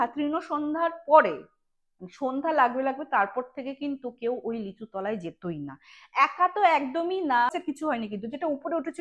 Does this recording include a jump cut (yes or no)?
yes